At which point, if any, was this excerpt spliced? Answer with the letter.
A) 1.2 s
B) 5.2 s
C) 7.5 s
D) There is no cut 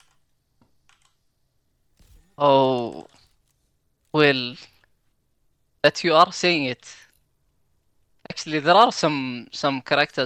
D